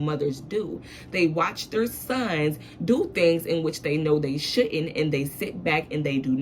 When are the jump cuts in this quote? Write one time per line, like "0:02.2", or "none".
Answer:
none